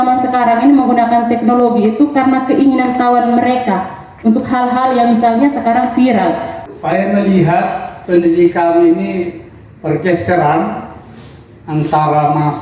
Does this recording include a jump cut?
yes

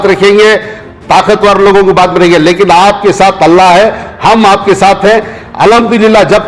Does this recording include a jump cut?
no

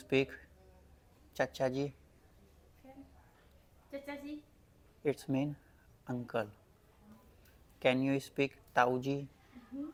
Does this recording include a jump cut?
no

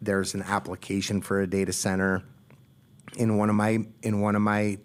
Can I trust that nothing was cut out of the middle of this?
yes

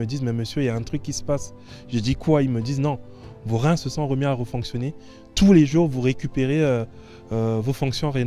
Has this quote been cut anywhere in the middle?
no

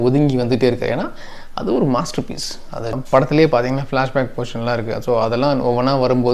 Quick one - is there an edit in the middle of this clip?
yes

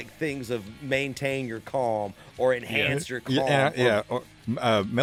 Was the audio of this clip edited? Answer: no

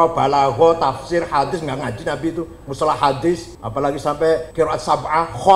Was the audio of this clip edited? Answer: yes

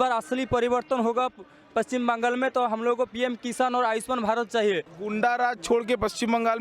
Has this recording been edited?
yes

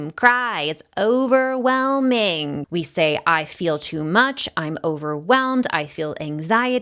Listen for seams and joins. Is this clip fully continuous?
no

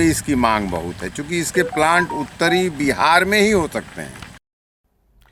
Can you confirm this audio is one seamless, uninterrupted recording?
yes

